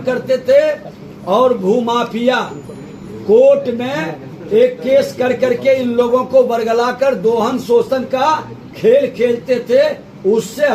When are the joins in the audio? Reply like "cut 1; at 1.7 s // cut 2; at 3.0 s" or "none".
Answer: none